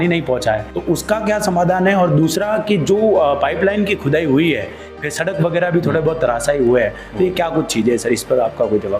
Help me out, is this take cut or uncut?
uncut